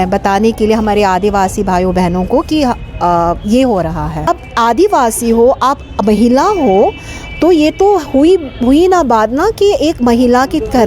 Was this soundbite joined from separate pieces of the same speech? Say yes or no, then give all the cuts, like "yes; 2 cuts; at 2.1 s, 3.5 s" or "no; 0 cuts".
yes; 1 cut; at 4.3 s